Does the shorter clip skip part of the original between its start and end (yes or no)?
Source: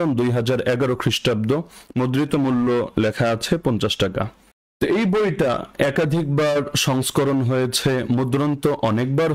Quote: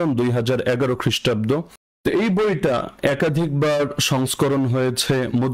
yes